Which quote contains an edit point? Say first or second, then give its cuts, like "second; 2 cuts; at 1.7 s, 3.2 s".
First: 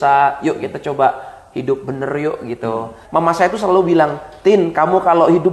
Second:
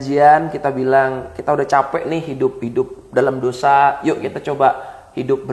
first; 1 cut; at 3.0 s